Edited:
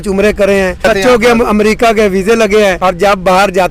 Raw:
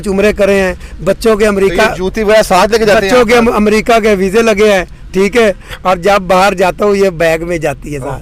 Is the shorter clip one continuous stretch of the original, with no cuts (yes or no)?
no